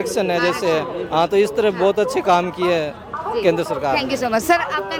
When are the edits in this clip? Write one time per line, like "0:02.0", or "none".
none